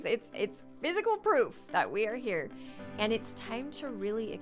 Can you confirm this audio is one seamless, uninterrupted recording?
yes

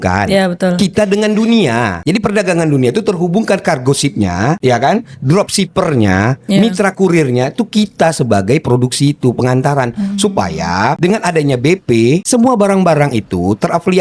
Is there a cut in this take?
no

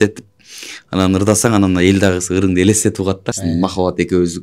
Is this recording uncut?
no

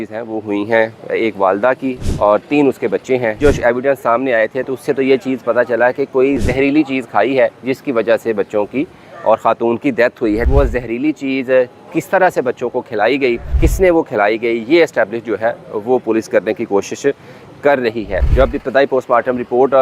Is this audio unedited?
no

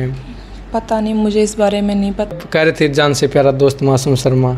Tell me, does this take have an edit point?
yes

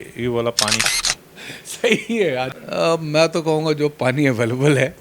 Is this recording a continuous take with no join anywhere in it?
no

